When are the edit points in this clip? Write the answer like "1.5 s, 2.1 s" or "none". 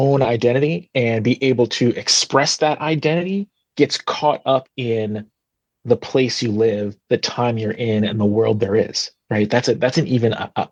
none